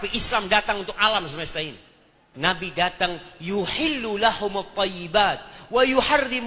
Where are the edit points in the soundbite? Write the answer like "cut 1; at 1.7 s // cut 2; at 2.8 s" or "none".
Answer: cut 1; at 2.2 s